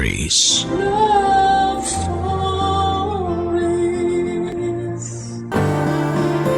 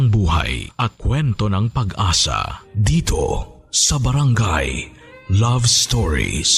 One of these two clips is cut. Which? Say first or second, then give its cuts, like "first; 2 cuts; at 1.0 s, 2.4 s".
first; 1 cut; at 5.3 s